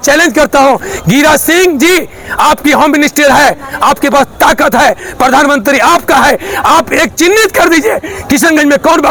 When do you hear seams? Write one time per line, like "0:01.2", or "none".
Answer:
none